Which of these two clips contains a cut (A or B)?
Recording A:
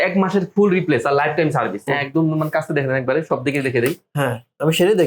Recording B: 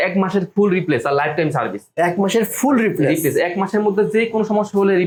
A